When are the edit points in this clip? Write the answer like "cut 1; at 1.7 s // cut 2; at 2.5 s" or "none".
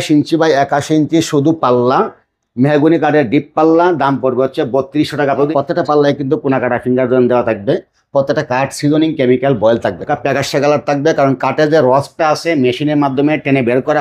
cut 1; at 5.5 s // cut 2; at 10.1 s